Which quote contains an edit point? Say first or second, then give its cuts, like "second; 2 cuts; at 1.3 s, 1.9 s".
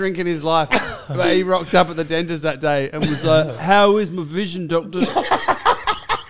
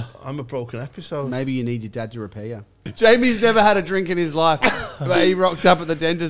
second; 1 cut; at 2.8 s